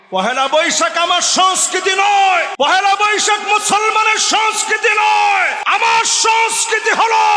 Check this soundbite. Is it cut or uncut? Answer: cut